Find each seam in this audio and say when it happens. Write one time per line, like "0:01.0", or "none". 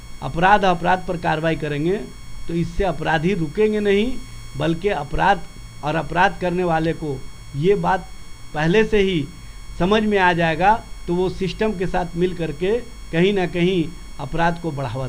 none